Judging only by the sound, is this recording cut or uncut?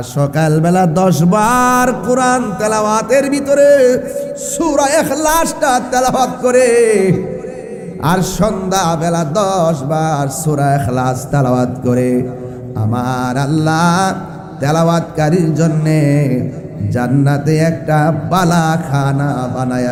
uncut